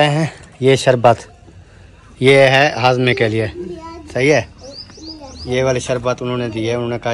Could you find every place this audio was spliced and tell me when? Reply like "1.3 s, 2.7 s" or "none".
none